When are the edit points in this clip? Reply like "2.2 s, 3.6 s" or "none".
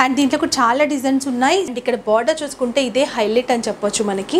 1.7 s